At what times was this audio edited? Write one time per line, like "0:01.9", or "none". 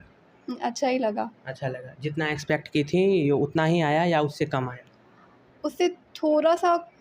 none